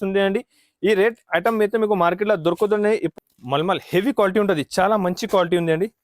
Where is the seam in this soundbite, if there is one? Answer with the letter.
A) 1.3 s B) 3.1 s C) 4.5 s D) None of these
B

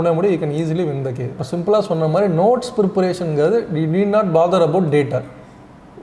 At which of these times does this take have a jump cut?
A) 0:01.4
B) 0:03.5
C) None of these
A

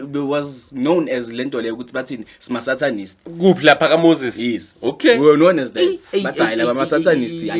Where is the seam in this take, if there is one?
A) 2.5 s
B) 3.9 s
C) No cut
C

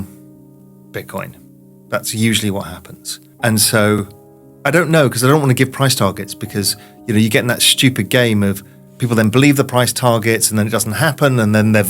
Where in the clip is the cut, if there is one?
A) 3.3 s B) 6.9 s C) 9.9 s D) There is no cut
A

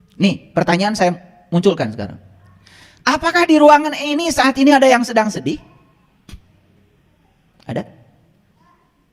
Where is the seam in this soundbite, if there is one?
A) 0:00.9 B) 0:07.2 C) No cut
A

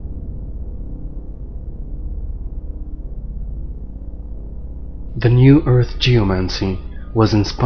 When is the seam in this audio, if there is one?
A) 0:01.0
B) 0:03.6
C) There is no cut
A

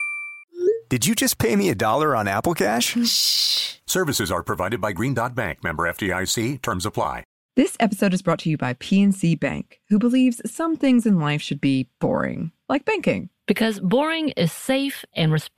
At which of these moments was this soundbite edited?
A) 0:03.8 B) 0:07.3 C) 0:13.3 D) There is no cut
B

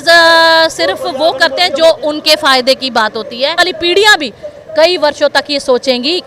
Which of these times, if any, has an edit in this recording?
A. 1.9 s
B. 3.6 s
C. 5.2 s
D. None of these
B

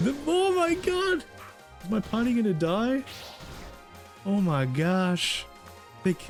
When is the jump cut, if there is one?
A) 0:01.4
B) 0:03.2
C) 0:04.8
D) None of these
D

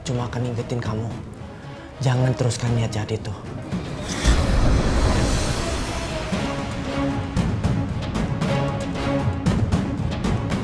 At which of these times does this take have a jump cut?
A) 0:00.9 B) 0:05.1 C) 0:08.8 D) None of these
D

